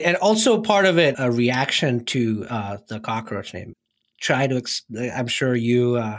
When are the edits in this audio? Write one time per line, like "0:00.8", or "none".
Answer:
0:01.2
0:03.9